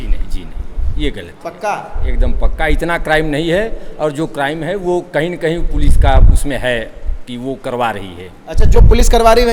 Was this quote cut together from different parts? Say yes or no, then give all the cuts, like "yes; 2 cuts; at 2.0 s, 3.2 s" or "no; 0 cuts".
no; 0 cuts